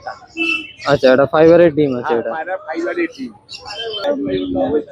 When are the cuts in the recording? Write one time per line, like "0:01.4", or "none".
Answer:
0:04.0